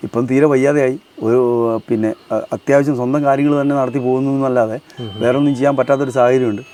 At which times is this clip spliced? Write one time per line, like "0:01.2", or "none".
none